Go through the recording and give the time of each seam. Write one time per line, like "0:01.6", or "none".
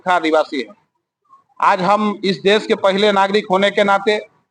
none